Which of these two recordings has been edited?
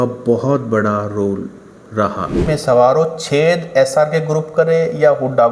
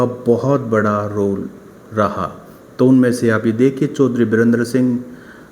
first; 1 cut; at 2.4 s

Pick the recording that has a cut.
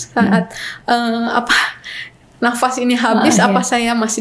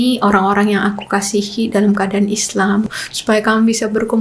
second; 1 cut; at 2.9 s

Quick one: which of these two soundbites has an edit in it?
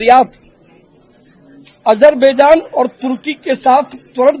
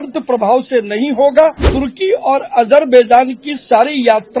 second; 1 cut; at 1.6 s

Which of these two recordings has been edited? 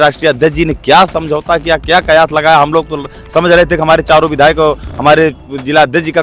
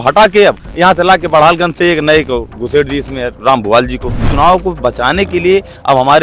second; 1 cut; at 4.3 s

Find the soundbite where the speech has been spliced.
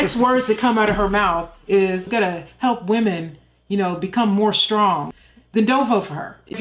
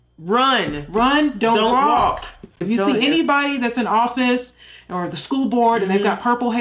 first; 2 cuts; at 2.1 s, 5.1 s

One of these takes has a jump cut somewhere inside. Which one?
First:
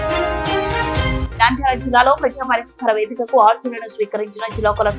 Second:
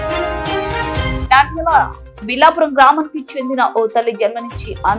second; 1 cut; at 1.2 s

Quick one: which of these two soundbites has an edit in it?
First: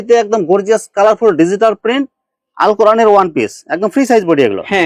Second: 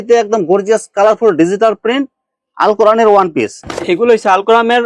second; 1 cut; at 3.6 s

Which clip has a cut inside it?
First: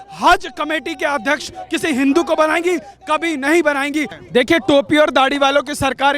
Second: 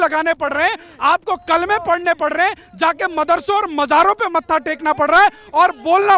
first; 1 cut; at 4.2 s

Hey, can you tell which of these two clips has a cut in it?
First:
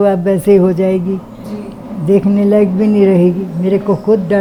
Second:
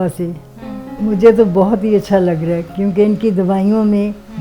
second; 1 cut; at 1.0 s

